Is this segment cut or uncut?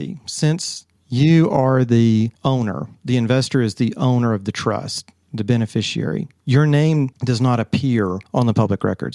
cut